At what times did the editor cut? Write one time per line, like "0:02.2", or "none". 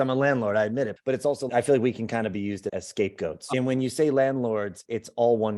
0:00.9
0:03.4

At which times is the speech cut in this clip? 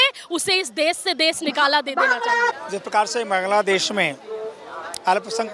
0:02.5

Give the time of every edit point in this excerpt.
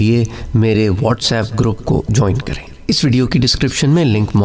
none

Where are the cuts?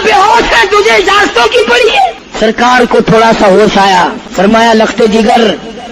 0:02.2
0:04.2

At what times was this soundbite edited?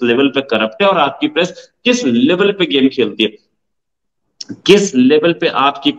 none

